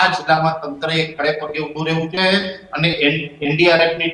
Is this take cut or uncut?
uncut